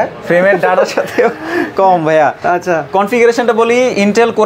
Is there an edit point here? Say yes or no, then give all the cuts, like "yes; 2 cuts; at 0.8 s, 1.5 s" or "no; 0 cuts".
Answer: no; 0 cuts